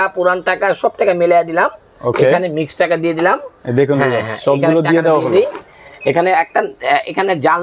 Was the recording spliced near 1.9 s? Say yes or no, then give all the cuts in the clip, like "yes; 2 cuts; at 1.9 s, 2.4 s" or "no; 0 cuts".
no; 0 cuts